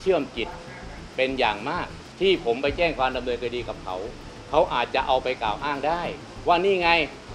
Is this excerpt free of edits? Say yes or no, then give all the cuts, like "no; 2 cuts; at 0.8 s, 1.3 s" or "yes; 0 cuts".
no; 2 cuts; at 2.0 s, 6.2 s